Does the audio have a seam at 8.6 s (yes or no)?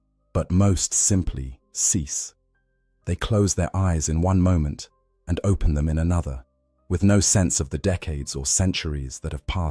no